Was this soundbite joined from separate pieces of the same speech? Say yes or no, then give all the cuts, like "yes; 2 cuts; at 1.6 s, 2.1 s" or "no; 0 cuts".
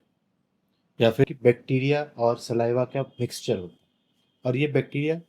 yes; 1 cut; at 1.3 s